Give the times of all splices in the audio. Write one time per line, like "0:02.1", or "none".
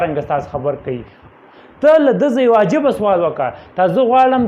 0:01.1